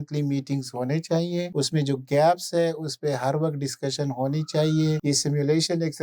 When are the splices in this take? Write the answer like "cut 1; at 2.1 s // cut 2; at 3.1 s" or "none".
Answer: cut 1; at 1.5 s // cut 2; at 5.0 s